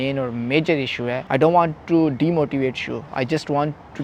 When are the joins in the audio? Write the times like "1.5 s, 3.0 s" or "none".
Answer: 1.2 s